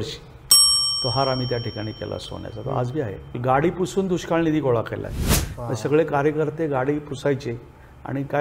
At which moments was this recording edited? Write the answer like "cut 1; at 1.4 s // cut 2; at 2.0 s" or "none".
cut 1; at 3.3 s